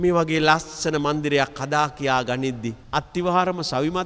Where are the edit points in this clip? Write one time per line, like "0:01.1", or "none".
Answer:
0:02.8